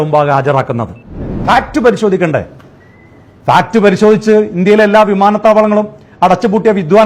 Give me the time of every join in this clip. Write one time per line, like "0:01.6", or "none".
0:01.4